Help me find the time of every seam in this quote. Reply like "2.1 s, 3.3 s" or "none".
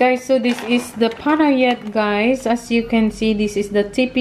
none